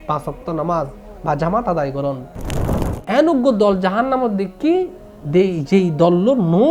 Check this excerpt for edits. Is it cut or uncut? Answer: cut